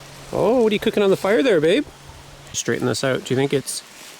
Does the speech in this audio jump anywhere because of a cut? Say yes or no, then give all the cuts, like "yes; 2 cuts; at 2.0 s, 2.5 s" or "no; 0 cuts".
yes; 1 cut; at 2.6 s